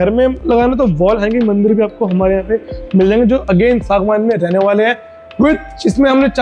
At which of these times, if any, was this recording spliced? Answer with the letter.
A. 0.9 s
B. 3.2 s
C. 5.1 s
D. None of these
D